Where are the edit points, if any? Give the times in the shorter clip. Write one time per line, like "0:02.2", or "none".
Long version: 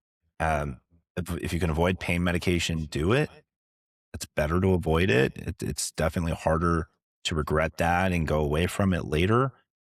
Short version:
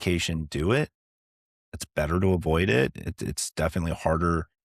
none